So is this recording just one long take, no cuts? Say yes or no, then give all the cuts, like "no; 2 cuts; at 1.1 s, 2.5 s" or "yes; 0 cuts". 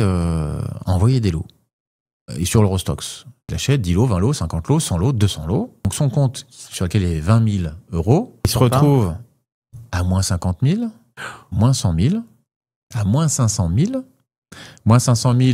no; 3 cuts; at 3.5 s, 5.9 s, 8.5 s